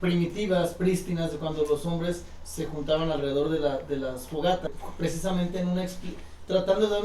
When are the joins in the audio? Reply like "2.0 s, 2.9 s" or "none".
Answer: 4.7 s